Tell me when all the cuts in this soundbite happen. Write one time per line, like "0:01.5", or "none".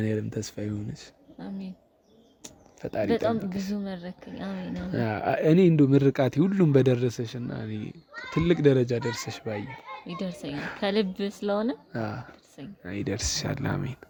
none

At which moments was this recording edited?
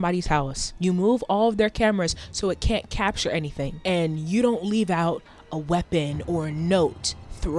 none

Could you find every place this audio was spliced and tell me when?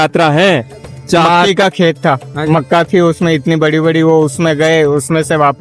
0:01.5

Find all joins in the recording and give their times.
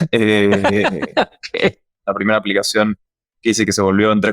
0:02.0

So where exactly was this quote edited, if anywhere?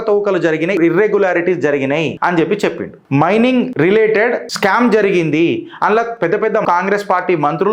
0:00.8
0:02.1
0:02.9
0:03.7
0:04.5
0:06.6

